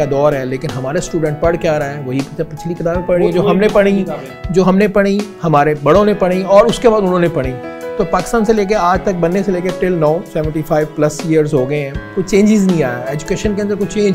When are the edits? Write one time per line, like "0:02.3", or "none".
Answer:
none